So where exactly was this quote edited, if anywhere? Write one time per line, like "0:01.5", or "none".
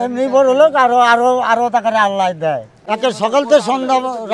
0:02.7